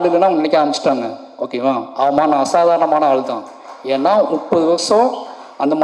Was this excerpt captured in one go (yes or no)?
yes